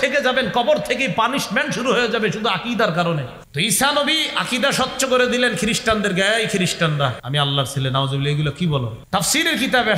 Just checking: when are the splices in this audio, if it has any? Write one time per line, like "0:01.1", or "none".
0:03.4
0:07.2
0:09.0

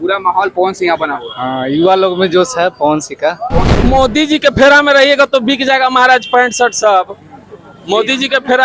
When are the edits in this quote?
0:03.4

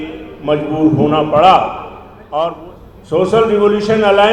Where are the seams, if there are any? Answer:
0:02.6

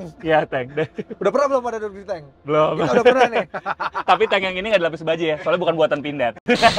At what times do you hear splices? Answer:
none

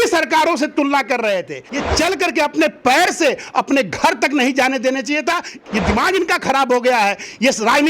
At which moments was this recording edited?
0:01.6
0:05.5

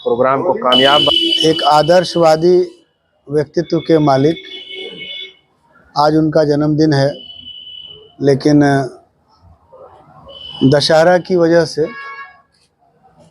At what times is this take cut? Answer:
0:01.1

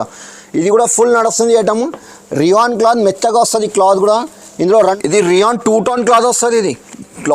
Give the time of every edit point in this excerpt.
0:05.0

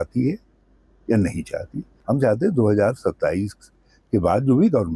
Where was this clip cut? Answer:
0:01.9

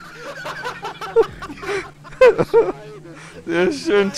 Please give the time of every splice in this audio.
none

